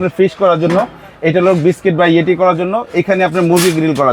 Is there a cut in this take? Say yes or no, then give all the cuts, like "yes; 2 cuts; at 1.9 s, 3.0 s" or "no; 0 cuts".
no; 0 cuts